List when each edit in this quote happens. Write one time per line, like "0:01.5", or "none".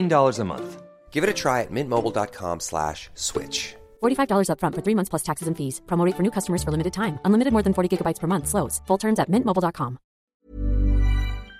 0:10.4